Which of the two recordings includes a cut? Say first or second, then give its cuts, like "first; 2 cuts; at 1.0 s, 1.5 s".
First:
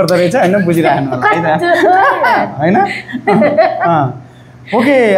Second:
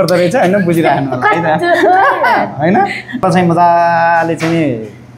second; 1 cut; at 3.2 s